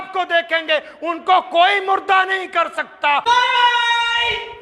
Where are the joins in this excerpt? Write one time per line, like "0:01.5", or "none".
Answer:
0:03.2